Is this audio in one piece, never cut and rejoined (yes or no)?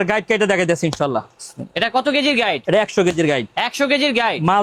yes